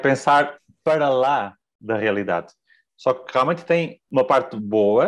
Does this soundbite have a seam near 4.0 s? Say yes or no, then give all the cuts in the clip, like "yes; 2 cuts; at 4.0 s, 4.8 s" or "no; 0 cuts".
yes; 1 cut; at 4.0 s